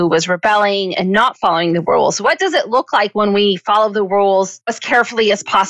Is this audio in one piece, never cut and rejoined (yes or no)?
no